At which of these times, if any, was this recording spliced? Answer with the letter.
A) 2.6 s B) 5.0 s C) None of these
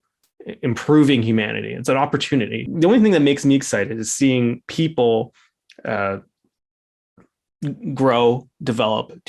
A